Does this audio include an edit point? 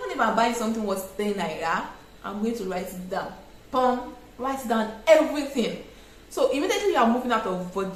no; 0 cuts

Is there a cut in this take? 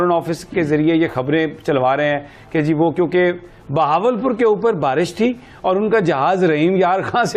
no; 0 cuts

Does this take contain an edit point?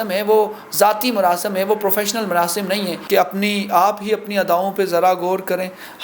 yes; 1 cut; at 3.0 s

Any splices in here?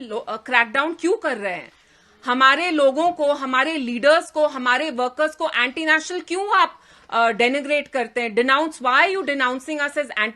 no; 0 cuts

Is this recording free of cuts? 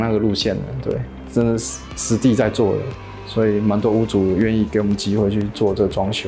yes; 0 cuts

